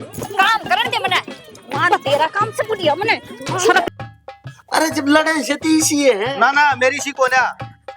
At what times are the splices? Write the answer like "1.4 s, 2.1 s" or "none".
3.8 s